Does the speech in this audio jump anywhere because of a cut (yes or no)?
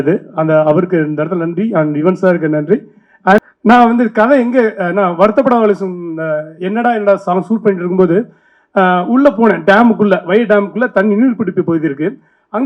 yes